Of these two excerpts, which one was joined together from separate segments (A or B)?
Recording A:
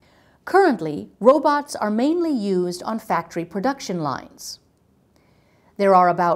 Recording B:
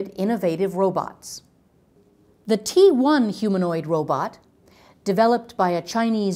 A